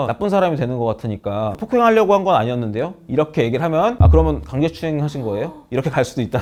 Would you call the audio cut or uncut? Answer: uncut